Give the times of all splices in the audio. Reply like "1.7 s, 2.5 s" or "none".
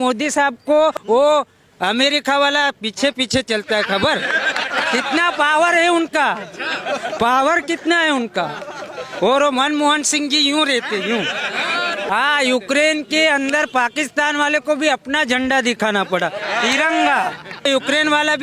1.0 s, 12.1 s, 17.7 s